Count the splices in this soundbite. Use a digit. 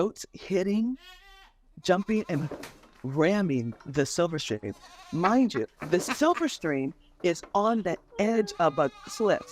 0